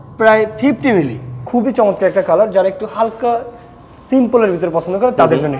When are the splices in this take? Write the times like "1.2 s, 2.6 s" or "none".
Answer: 1.4 s

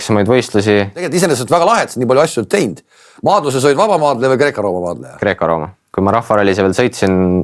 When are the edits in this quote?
1.1 s, 5.8 s

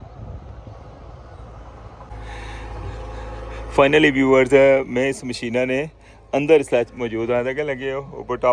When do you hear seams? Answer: 2.1 s

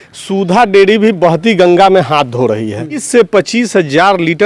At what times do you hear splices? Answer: 3.0 s

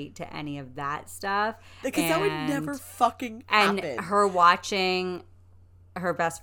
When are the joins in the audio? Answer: none

